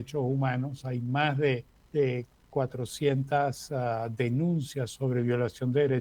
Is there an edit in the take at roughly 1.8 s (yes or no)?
yes